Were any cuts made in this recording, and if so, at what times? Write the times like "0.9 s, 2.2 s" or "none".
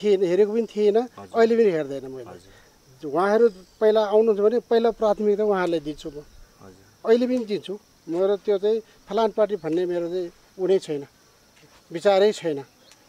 none